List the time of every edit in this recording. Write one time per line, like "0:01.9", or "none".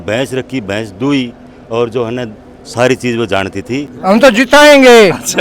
0:03.9